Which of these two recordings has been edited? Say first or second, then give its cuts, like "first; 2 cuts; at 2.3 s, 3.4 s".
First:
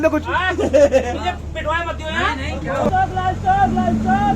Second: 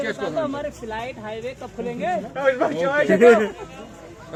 first; 1 cut; at 2.8 s